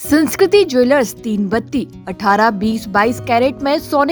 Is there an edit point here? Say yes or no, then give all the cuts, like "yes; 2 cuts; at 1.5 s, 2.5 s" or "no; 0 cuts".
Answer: no; 0 cuts